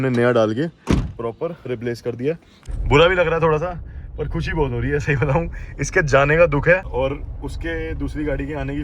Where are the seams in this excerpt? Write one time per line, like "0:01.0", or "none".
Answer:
0:02.0
0:06.9